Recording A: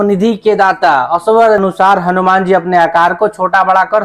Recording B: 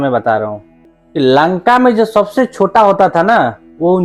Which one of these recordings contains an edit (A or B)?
A